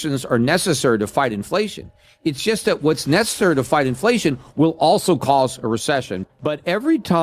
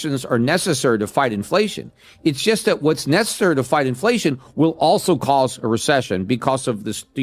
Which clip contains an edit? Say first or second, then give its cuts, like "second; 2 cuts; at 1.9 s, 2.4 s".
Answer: first; 1 cut; at 6.1 s